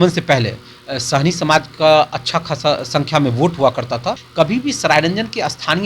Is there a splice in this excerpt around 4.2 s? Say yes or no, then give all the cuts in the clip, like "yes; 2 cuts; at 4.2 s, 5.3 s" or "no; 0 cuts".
yes; 1 cut; at 4.2 s